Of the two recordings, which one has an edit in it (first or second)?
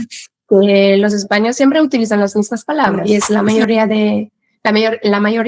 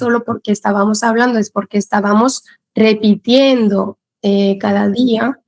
first